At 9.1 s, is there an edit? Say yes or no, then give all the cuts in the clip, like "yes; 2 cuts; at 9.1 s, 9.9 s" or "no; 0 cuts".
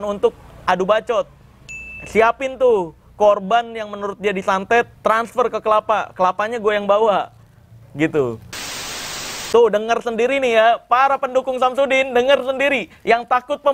yes; 1 cut; at 9.1 s